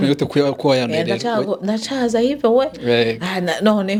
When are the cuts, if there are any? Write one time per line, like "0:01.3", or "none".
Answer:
none